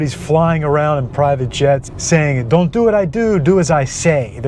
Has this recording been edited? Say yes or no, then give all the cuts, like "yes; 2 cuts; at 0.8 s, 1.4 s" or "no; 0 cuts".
yes; 1 cut; at 1.9 s